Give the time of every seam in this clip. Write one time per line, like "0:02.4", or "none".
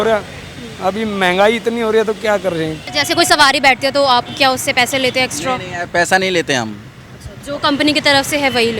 0:02.9